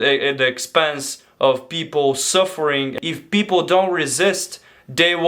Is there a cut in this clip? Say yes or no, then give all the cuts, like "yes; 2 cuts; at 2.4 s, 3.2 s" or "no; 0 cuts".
yes; 1 cut; at 2.9 s